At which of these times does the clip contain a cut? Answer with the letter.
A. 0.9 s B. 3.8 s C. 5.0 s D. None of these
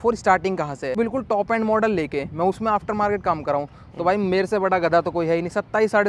A